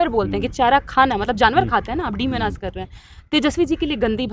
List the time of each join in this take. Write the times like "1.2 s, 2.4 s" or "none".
none